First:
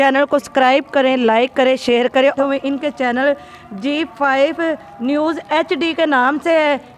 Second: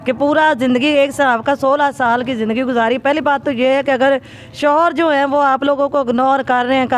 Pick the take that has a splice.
first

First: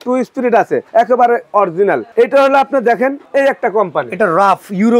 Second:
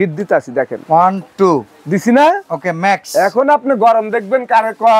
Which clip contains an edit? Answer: first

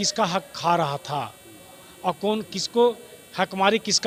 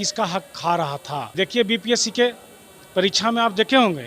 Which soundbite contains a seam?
second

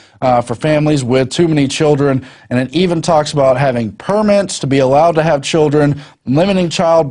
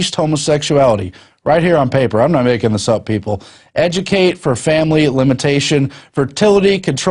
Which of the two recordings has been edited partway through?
second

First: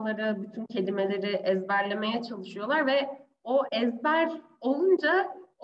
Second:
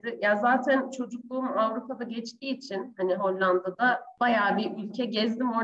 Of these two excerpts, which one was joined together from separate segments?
second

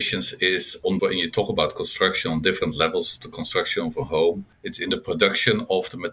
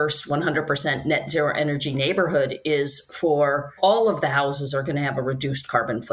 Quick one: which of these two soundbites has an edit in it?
first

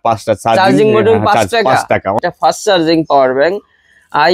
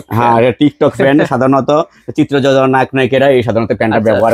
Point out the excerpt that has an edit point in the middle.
first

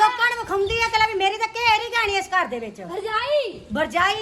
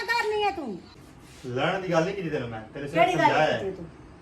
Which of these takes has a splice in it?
second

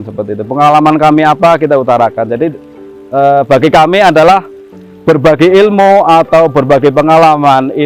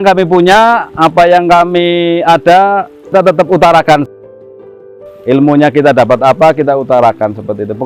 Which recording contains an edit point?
second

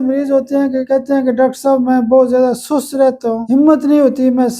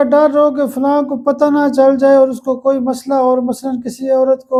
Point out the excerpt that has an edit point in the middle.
first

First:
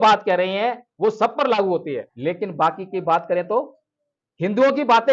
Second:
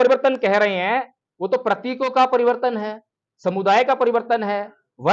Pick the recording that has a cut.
first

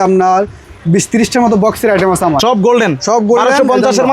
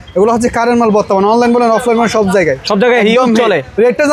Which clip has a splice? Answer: first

